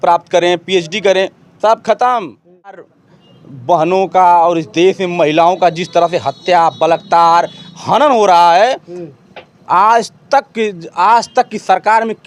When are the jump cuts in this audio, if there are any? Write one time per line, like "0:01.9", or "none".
0:02.9